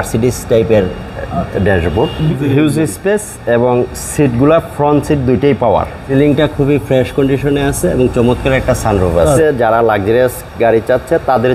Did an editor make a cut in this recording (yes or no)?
yes